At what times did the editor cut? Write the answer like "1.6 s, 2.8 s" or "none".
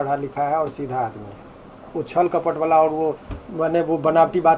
none